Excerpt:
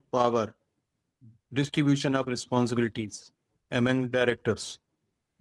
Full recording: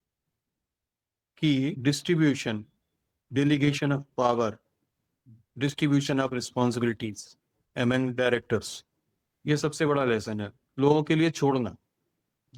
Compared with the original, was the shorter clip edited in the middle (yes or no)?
no